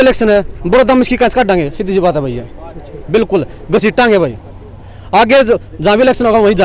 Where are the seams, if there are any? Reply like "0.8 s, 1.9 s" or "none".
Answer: none